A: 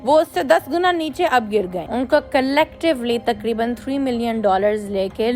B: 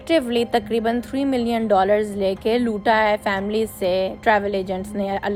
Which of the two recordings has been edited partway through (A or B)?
A